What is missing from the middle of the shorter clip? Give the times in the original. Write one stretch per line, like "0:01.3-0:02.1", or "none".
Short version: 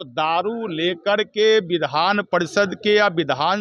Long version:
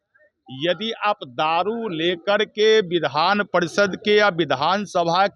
none